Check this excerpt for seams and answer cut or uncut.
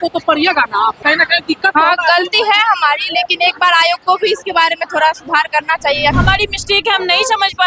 cut